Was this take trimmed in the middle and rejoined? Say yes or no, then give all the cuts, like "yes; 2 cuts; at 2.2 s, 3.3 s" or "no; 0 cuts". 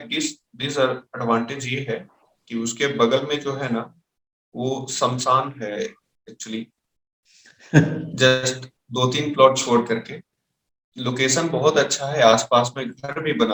no; 0 cuts